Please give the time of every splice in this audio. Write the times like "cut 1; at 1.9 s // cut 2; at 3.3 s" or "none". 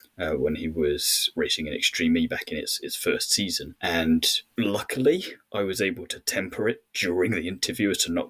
cut 1; at 1.3 s // cut 2; at 3.7 s // cut 3; at 4.4 s